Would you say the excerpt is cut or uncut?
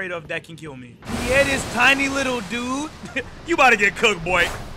cut